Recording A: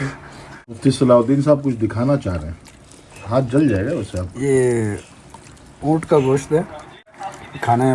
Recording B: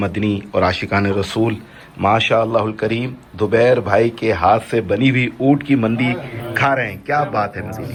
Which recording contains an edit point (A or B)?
A